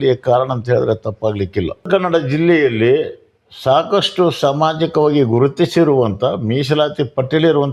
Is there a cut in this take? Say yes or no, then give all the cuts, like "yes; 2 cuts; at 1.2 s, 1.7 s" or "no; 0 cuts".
yes; 1 cut; at 1.8 s